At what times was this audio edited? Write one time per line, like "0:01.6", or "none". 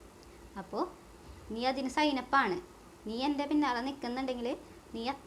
none